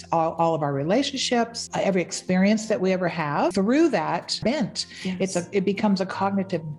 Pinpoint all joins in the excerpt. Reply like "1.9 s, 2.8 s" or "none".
1.6 s, 3.5 s, 4.3 s